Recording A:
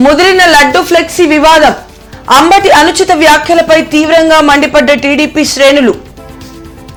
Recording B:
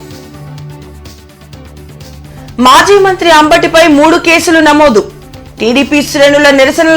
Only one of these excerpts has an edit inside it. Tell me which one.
B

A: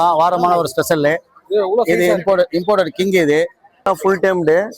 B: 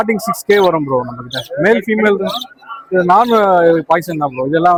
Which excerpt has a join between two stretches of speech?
A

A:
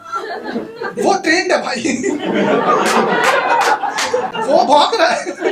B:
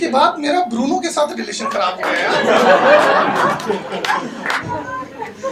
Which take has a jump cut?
A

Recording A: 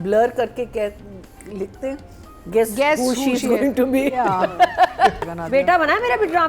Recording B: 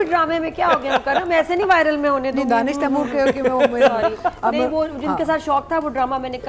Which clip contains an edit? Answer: A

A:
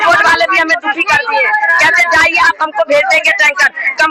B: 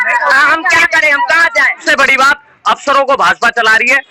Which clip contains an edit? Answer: B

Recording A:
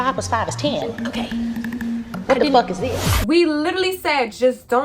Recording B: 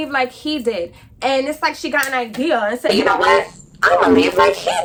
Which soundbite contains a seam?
A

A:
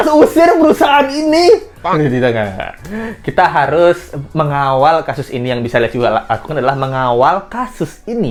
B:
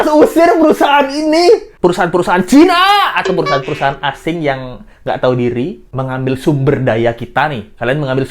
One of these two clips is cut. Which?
B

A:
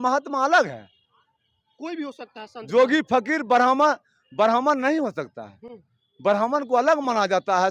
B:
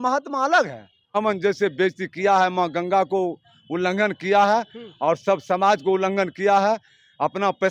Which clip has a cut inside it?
B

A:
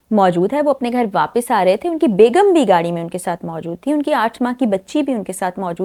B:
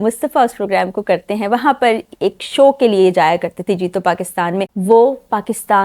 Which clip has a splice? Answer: B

